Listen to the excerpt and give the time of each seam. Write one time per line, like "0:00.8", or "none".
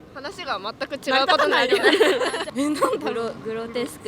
0:02.4